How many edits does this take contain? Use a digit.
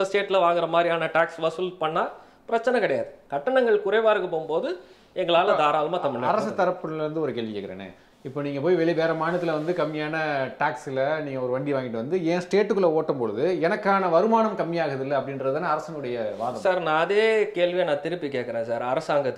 0